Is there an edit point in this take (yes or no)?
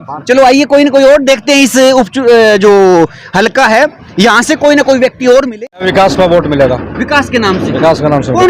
yes